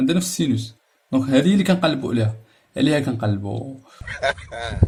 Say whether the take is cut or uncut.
uncut